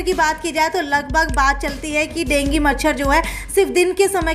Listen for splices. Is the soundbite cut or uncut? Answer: uncut